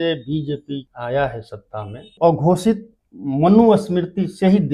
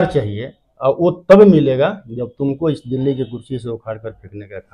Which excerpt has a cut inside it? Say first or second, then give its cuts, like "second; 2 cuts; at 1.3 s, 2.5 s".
first; 2 cuts; at 0.9 s, 2.1 s